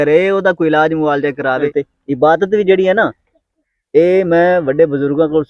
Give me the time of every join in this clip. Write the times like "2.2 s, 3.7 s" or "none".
1.7 s